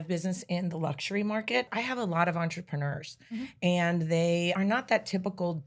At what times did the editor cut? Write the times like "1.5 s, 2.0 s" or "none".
1.7 s, 4.6 s